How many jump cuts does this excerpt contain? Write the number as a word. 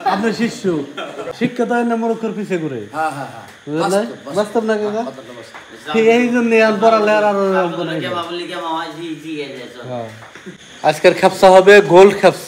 two